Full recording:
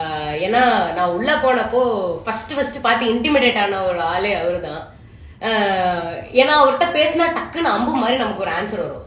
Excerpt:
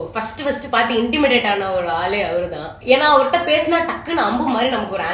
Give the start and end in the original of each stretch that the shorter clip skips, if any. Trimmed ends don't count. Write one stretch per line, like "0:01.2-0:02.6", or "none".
0:04.8-0:06.2